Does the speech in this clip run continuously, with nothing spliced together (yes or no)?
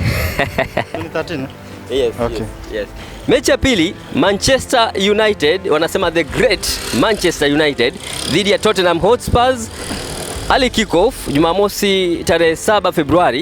no